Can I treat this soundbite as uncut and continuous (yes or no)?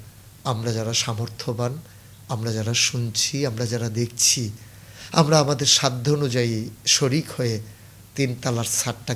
yes